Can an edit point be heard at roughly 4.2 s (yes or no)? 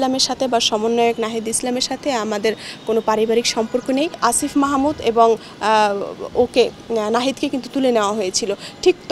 yes